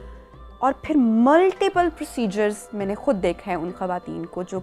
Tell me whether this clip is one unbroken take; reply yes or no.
yes